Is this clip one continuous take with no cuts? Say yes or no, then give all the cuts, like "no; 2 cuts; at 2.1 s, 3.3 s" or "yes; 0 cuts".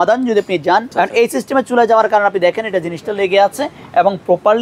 no; 1 cut; at 0.9 s